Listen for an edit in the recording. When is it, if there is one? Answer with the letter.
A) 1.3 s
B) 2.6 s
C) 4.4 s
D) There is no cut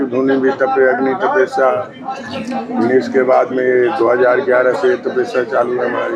D